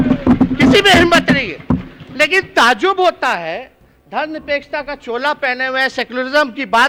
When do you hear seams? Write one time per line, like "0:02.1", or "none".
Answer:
none